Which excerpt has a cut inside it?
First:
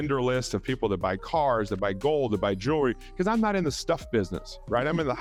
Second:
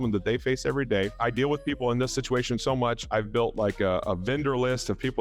second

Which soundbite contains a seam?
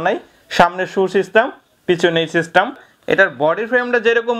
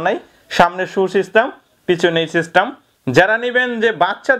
first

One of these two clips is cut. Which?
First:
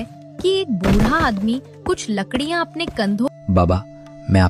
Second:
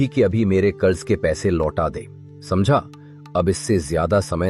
first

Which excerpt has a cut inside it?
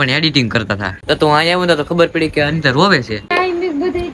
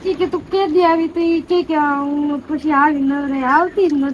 first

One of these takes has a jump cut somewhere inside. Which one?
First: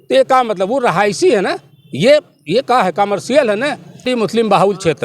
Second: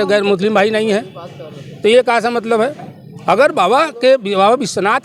first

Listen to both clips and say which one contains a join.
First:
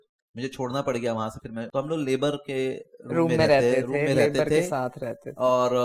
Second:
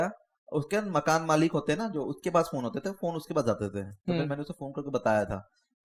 first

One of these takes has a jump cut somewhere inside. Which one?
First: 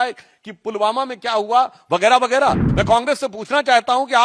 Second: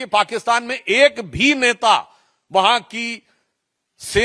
first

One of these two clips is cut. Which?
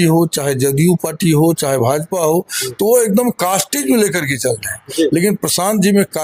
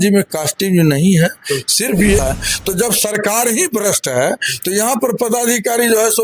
second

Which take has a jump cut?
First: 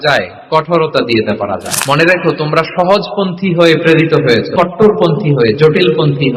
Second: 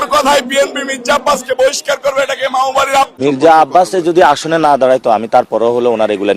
second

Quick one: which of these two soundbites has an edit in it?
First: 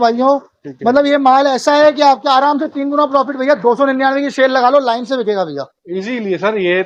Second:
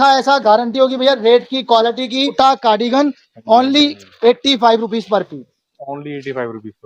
second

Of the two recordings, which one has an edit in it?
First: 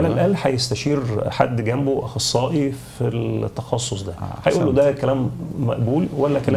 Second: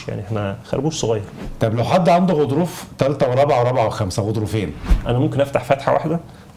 second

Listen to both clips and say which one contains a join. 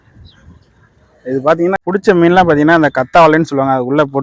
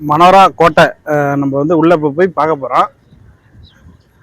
first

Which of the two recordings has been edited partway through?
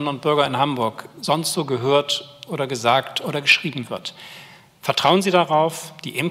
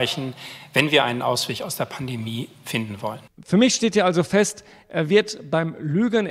second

